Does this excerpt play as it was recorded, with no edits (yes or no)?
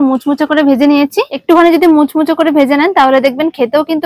no